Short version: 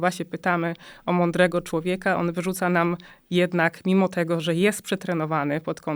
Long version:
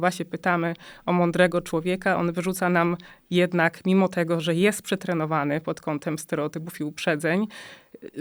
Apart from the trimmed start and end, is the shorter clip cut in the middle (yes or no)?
no